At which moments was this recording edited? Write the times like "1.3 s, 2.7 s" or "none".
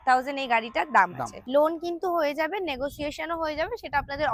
none